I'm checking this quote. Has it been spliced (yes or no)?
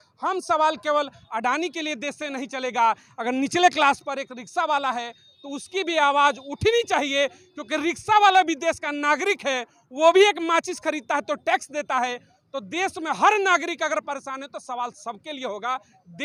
no